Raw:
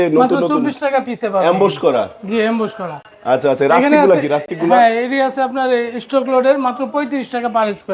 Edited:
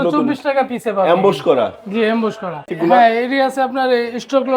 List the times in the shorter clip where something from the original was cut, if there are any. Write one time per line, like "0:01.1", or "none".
0:02.7